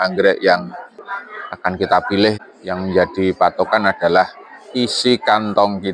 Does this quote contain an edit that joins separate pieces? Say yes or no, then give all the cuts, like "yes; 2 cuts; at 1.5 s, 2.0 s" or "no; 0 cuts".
yes; 1 cut; at 2.4 s